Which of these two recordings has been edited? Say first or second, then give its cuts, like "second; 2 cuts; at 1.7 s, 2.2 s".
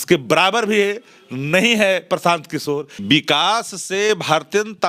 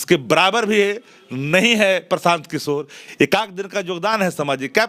first; 1 cut; at 2.9 s